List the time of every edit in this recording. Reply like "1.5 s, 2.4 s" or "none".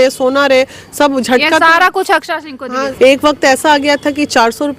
2.8 s